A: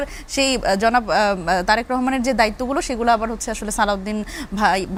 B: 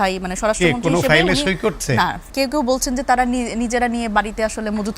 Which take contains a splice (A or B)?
B